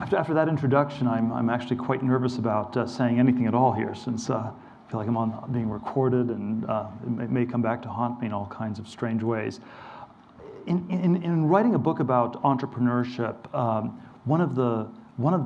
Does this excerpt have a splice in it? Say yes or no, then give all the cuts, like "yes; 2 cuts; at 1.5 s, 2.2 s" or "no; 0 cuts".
yes; 1 cut; at 5.1 s